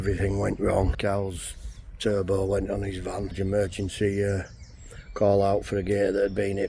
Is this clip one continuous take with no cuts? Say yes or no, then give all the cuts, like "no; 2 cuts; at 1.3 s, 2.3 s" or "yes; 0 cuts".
no; 2 cuts; at 0.9 s, 3.3 s